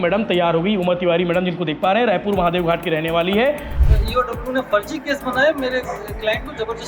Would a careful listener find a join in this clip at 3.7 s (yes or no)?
yes